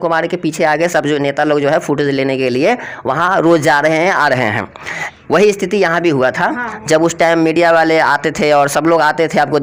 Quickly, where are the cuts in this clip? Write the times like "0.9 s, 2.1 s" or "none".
none